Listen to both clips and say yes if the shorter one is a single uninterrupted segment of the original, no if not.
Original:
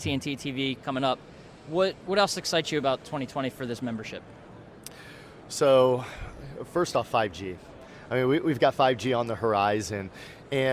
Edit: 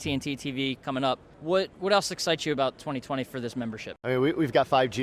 no